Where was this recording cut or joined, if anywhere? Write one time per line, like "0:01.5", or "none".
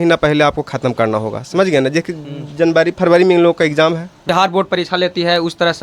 0:04.3